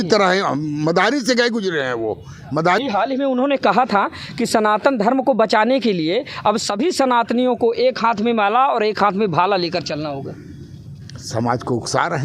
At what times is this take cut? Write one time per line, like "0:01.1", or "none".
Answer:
0:02.8